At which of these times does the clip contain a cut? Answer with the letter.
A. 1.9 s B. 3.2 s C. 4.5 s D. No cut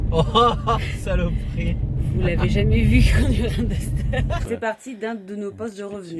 C